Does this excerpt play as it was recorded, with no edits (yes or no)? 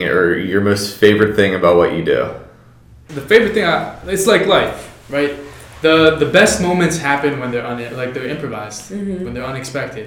no